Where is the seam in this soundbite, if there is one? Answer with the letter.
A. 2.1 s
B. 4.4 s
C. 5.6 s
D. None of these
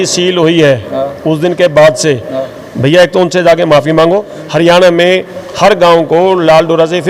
B